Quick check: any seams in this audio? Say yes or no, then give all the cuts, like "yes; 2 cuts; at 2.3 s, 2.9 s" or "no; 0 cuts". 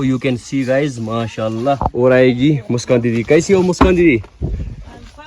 yes; 1 cut; at 1.8 s